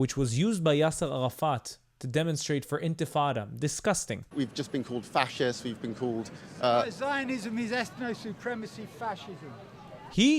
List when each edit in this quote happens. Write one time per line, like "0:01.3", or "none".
0:04.3